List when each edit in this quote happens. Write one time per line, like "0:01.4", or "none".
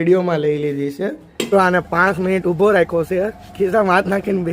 0:01.5